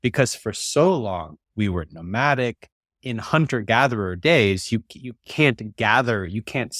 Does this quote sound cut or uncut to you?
cut